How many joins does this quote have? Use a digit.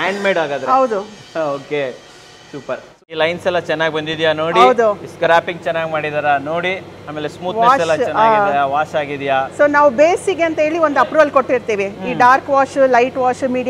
1